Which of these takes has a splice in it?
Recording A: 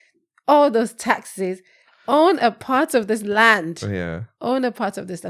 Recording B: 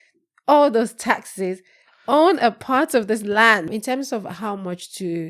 B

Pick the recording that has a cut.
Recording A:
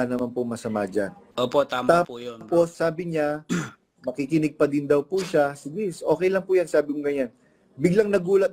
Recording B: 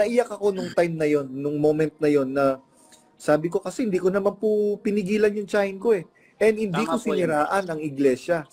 A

